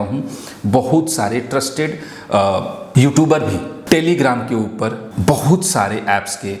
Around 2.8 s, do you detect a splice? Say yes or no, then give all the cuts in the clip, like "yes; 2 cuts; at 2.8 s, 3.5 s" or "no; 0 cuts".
yes; 3 cuts; at 2.8 s, 3.7 s, 5.1 s